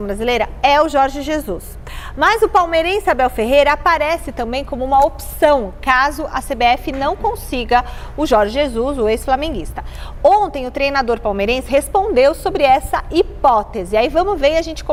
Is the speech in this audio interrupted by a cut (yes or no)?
no